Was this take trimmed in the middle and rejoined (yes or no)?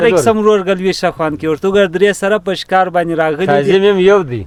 no